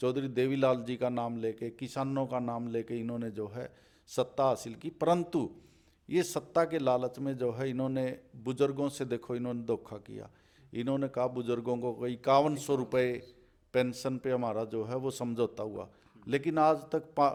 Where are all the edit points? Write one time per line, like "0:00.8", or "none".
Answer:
none